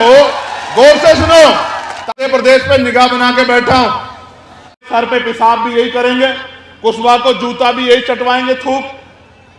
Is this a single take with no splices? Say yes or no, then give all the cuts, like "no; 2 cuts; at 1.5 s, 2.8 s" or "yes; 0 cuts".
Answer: no; 2 cuts; at 2.1 s, 4.9 s